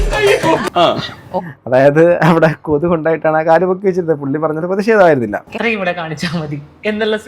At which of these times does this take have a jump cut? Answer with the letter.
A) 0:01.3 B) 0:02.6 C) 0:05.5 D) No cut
C